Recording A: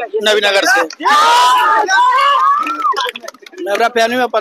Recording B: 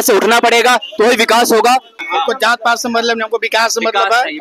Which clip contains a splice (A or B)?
B